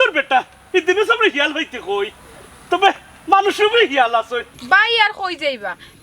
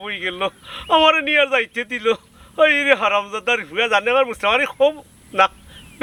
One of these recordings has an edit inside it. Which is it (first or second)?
first